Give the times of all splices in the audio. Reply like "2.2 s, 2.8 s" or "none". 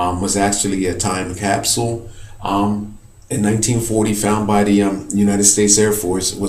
none